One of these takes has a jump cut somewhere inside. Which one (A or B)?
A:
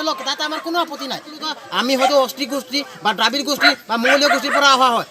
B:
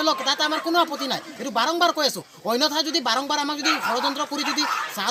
A